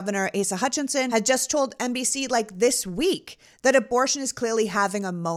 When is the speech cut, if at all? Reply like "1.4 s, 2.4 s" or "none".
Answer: 1.1 s

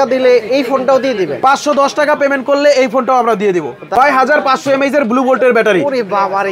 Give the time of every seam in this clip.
3.9 s

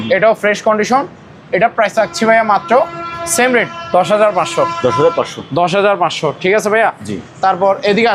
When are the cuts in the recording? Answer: none

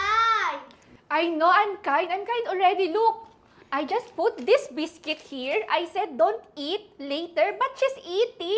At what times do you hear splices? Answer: none

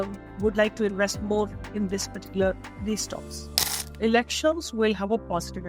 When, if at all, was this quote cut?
3.5 s

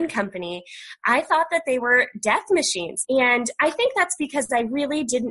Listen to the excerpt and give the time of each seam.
2.9 s

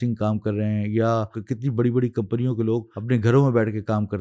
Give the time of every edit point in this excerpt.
1.4 s, 2.9 s

